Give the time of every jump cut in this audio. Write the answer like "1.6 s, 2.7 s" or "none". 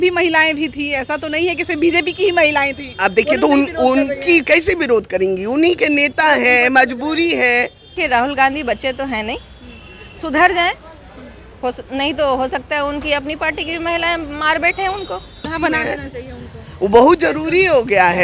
7.9 s, 15.5 s